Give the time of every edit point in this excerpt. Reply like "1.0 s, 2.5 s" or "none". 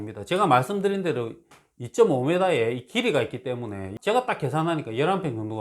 3.9 s